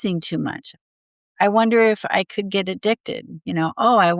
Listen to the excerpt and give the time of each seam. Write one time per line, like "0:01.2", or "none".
none